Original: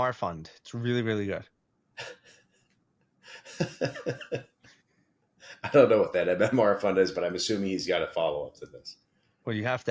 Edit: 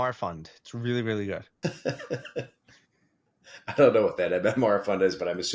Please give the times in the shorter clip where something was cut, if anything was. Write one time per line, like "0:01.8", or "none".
0:01.5